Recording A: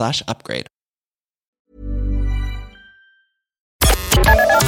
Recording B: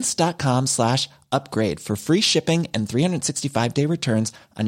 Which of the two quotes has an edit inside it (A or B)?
A